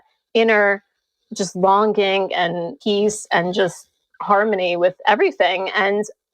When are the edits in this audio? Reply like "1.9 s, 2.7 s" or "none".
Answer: 2.8 s